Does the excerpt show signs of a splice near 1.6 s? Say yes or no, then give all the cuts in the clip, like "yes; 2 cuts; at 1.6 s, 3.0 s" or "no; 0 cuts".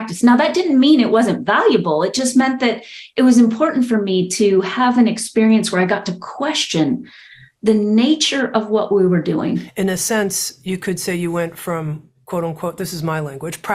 no; 1 cut; at 9.7 s